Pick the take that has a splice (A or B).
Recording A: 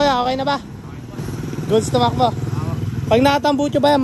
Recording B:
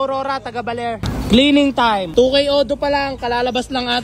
B